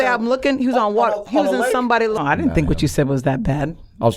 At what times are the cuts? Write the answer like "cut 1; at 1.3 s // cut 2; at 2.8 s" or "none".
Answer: cut 1; at 2.2 s